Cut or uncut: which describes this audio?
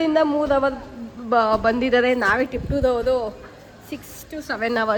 uncut